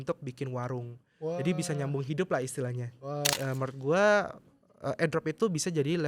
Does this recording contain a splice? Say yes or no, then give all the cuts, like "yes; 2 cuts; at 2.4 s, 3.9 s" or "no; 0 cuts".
yes; 1 cut; at 3.3 s